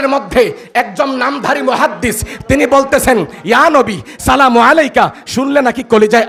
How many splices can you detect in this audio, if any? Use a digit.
0